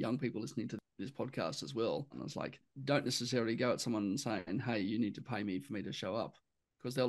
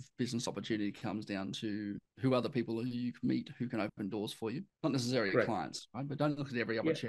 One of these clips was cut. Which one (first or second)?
first